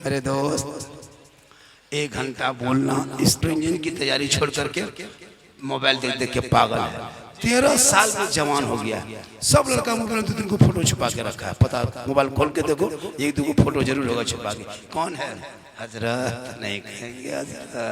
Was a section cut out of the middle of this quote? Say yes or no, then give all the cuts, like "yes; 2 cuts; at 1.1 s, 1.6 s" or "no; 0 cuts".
yes; 1 cut; at 3.4 s